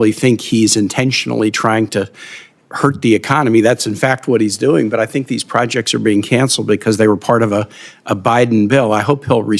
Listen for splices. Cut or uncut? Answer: uncut